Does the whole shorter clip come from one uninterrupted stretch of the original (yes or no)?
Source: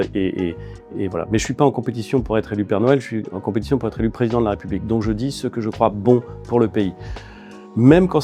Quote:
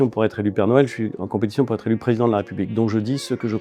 yes